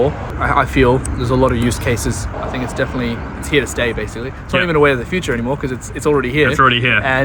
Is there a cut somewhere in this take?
no; 0 cuts

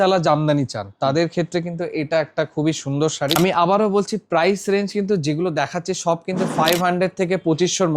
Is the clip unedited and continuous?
no; 1 cut; at 3.4 s

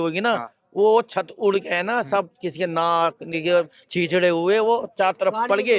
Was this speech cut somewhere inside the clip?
no; 0 cuts

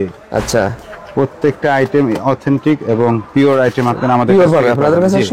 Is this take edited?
no; 0 cuts

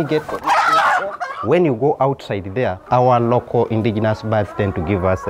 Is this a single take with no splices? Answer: no; 2 cuts; at 1.3 s, 2.8 s

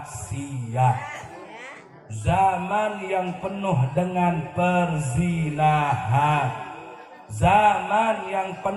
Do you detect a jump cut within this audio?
no; 0 cuts

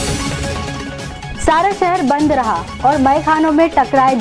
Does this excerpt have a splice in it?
yes; 1 cut; at 1.2 s

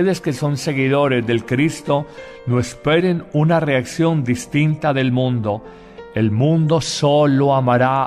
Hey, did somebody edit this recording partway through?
yes; 1 cut; at 5.3 s

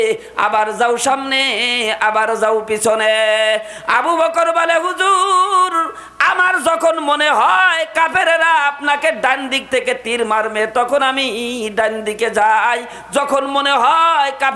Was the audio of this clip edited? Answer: no; 0 cuts

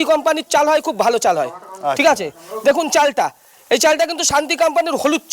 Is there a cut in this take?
no; 0 cuts

